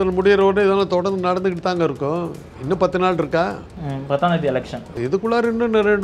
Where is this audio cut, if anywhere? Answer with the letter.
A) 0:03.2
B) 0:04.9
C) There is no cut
B